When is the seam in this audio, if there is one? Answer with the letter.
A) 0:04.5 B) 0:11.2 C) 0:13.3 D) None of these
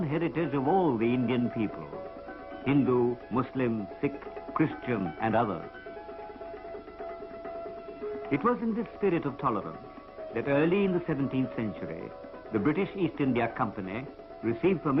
B